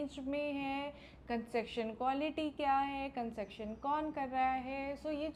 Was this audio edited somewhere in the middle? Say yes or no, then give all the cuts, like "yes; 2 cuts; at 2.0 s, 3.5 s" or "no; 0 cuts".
no; 0 cuts